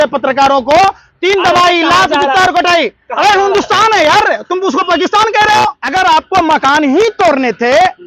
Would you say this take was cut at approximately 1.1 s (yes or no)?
no